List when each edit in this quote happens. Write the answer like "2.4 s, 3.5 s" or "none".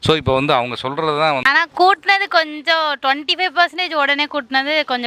1.4 s

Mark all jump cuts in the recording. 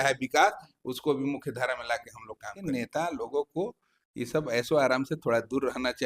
2.6 s

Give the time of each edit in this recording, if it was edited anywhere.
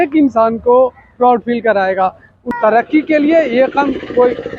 2.4 s

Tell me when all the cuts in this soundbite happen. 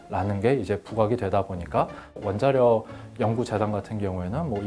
2.1 s

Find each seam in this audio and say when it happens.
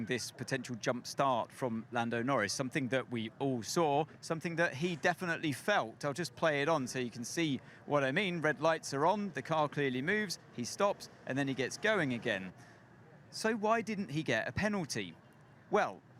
2.8 s

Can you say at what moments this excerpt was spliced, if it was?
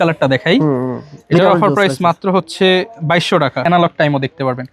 3.6 s

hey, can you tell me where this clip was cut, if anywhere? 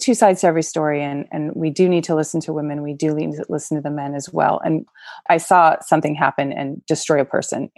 5.1 s

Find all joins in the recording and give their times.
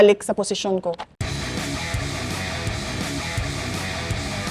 1.1 s

